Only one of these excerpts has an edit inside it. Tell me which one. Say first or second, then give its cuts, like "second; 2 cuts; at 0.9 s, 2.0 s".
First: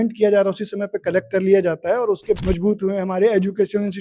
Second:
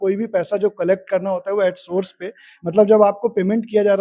first; 1 cut; at 2.4 s